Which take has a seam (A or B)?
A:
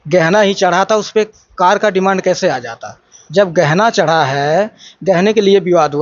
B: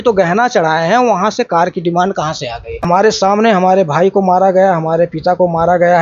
B